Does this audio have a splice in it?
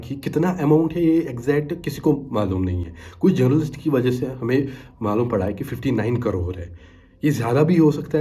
no; 0 cuts

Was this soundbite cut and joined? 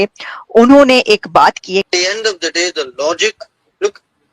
yes; 1 cut; at 1.9 s

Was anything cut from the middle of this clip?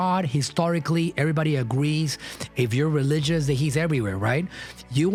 no; 0 cuts

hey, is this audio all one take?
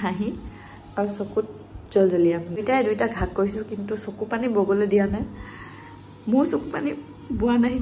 no; 1 cut; at 2.6 s

